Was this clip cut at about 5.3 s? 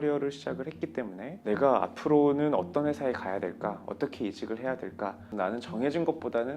yes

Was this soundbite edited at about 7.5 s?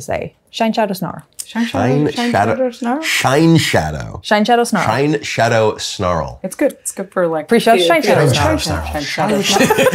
yes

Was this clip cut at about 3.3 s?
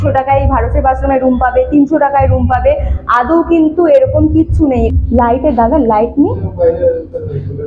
no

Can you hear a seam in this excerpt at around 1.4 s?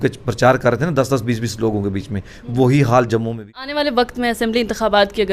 no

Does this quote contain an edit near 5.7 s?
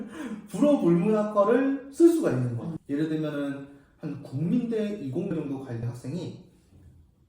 no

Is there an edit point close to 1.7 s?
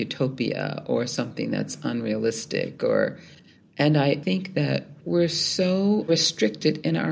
no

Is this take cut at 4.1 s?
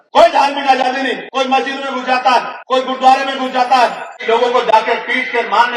yes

